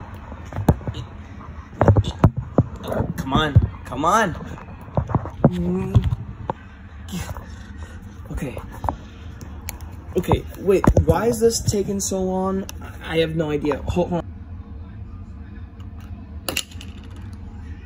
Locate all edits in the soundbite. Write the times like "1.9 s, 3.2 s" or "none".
14.2 s